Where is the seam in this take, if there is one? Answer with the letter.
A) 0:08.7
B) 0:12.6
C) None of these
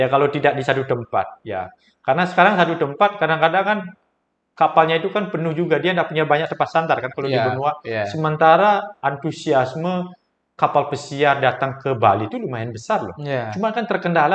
C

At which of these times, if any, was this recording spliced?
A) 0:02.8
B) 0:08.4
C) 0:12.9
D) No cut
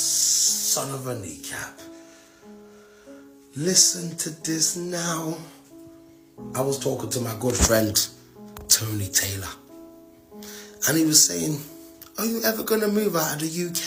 D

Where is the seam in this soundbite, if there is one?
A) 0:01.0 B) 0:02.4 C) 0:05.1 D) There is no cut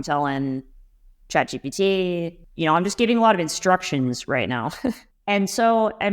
B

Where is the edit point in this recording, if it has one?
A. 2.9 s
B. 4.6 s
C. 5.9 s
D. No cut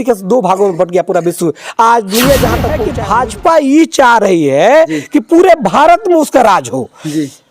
A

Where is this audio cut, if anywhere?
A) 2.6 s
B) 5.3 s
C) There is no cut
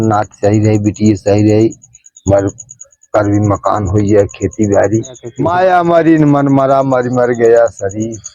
B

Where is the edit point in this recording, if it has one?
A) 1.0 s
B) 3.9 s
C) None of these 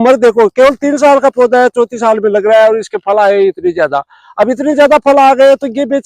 C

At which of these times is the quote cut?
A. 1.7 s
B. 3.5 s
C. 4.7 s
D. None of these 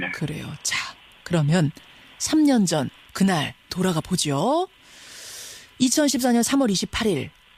B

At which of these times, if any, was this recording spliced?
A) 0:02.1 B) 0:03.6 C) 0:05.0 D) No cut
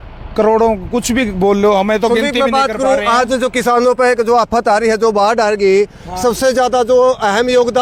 D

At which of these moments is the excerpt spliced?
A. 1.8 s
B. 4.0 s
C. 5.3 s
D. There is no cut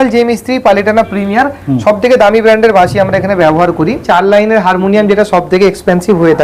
B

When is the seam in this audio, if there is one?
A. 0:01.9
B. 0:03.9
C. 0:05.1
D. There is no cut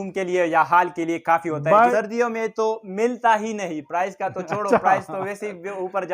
A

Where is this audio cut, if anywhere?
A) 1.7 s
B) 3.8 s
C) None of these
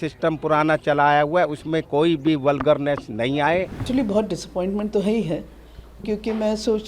B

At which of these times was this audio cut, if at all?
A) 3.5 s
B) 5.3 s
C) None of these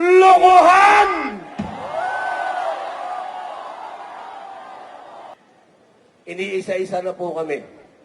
B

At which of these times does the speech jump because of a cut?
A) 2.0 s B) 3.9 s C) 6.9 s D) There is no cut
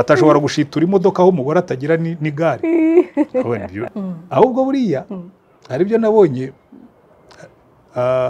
B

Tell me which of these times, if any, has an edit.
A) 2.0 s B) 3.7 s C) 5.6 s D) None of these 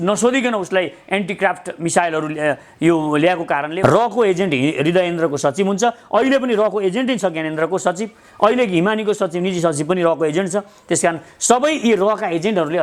B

